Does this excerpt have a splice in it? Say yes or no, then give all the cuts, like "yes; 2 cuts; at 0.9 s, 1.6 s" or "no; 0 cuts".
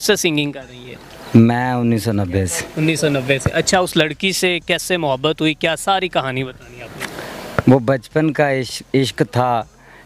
no; 0 cuts